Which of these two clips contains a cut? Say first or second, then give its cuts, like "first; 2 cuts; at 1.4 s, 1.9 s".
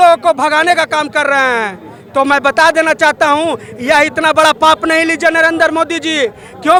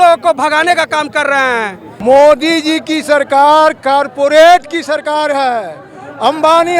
second; 1 cut; at 1.9 s